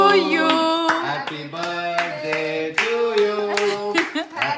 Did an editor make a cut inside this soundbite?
no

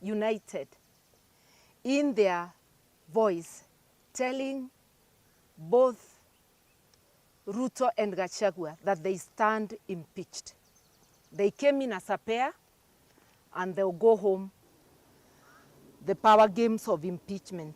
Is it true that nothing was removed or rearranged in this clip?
no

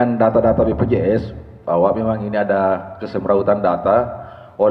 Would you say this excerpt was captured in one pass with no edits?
yes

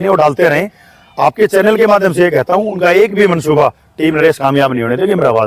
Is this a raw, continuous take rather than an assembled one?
yes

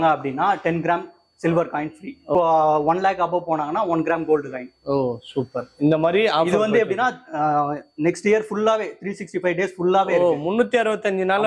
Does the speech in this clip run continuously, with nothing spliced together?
no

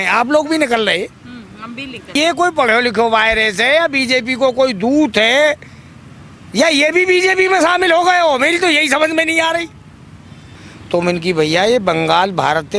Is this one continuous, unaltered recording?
no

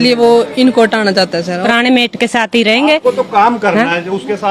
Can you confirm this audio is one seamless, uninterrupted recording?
no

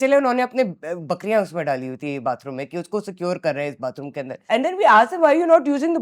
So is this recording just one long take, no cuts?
no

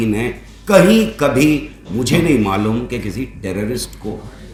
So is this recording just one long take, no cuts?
yes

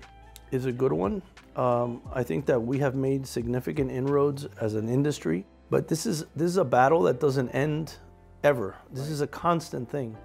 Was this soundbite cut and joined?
yes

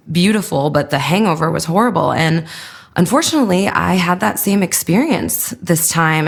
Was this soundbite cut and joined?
no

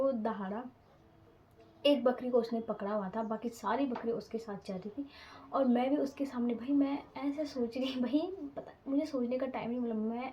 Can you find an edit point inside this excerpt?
no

